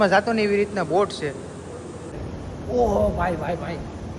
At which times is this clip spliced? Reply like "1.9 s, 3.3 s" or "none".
2.2 s